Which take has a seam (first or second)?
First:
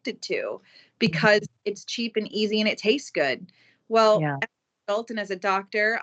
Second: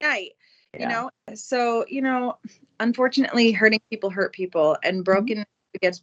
second